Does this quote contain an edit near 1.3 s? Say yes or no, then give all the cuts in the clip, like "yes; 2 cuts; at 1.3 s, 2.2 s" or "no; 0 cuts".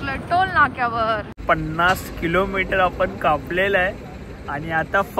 yes; 1 cut; at 1.3 s